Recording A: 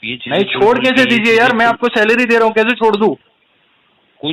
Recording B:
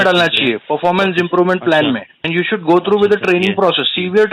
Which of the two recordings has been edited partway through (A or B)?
B